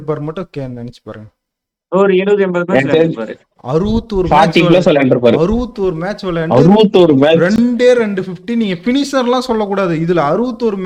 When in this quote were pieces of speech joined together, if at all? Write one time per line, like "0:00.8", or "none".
none